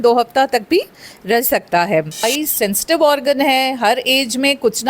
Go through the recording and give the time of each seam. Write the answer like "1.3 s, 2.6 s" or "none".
2.2 s

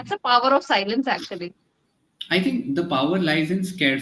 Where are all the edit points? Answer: none

